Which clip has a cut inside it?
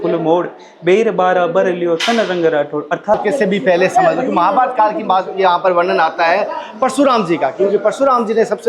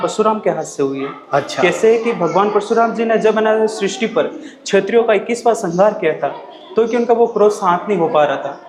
first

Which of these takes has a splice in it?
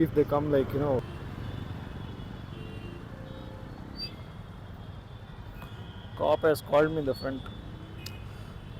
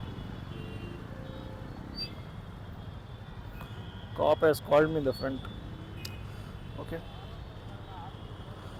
first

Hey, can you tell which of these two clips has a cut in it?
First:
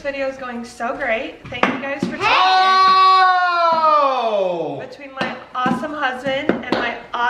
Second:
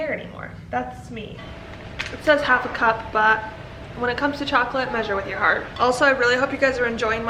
second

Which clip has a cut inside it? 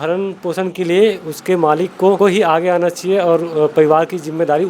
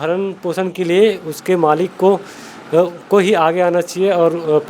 first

